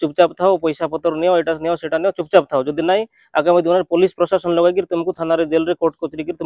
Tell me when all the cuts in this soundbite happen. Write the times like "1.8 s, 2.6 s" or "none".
none

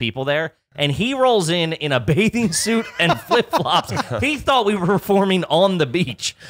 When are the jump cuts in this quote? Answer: none

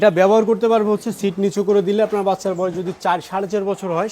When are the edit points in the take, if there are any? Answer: none

